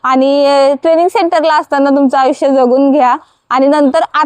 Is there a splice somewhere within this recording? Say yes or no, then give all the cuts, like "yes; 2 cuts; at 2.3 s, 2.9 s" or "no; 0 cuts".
no; 0 cuts